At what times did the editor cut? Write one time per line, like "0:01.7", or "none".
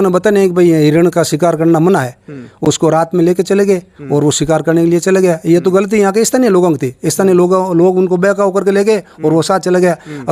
none

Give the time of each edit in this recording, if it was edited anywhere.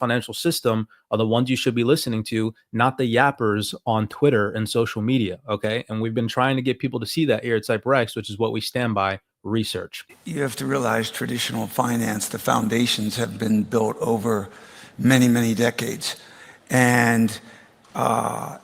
0:10.2

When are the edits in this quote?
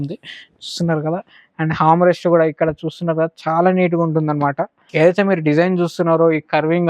0:04.8

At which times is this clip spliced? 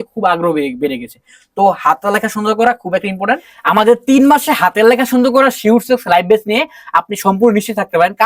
0:03.5

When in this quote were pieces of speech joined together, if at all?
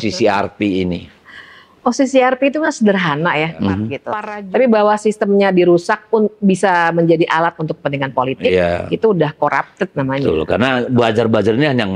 0:04.0

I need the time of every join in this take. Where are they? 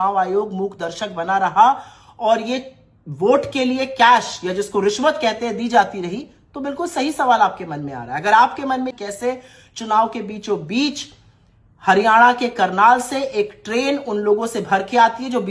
0:09.0

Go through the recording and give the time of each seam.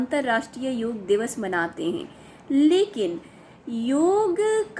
none

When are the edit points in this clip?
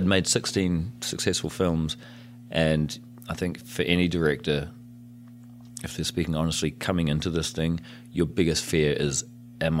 none

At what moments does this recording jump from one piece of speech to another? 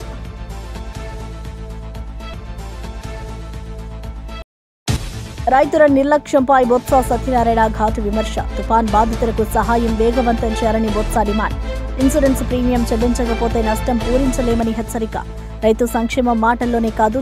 0:02.3
0:04.4

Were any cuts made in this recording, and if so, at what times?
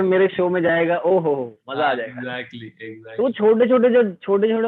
none

